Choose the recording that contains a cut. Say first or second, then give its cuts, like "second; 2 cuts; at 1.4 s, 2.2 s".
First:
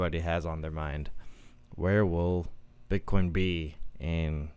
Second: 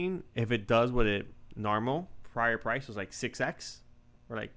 second; 1 cut; at 2.2 s